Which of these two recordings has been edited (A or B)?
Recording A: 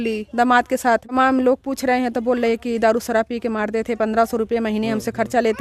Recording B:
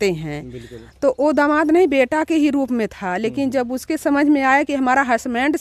A